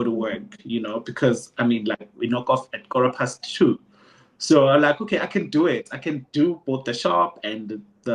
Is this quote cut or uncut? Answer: uncut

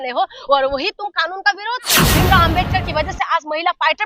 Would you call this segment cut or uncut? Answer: cut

